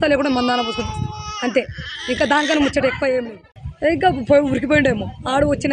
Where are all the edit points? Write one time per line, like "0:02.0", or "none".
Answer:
0:03.6

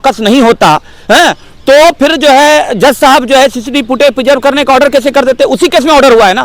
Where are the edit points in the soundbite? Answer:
none

